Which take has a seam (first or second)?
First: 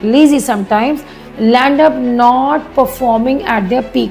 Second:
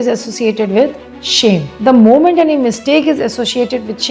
second